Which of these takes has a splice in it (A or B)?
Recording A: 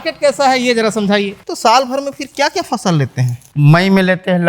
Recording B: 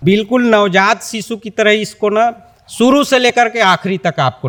A